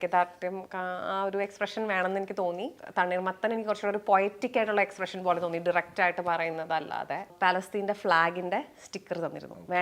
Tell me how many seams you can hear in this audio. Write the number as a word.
two